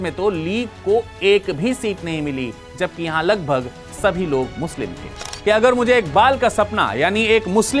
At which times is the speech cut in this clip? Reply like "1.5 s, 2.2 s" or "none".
5.3 s